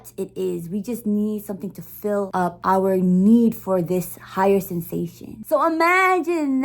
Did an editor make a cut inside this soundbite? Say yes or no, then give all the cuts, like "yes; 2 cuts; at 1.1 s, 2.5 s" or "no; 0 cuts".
yes; 2 cuts; at 2.5 s, 5.3 s